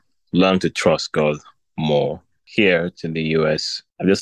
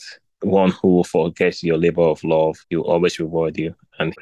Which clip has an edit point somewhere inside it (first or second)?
first